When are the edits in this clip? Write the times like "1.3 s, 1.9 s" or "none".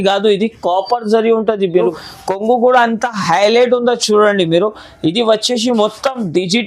2.0 s